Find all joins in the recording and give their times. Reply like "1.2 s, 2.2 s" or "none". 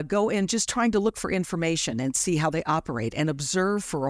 none